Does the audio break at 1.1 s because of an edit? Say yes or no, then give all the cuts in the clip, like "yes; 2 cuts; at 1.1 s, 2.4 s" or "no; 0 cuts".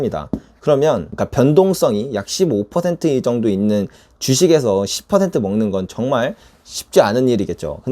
yes; 1 cut; at 1.1 s